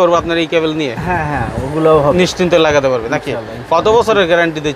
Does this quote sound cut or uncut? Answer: uncut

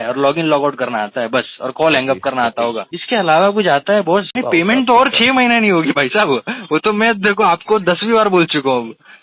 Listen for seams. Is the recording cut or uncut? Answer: cut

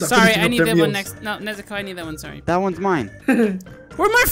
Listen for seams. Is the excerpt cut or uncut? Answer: uncut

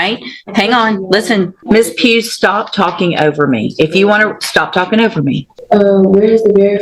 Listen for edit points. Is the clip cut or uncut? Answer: cut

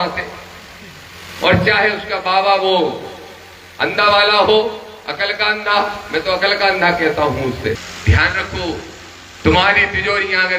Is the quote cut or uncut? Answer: cut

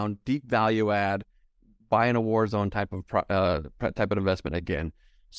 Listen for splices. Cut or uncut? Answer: uncut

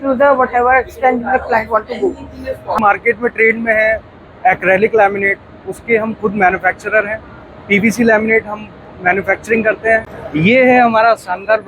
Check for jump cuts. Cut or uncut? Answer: cut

